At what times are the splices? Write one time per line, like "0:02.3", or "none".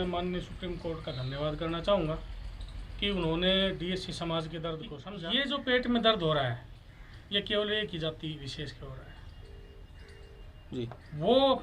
0:05.0